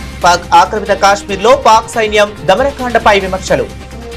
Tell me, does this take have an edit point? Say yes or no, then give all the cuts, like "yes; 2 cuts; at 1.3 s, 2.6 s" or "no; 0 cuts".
no; 0 cuts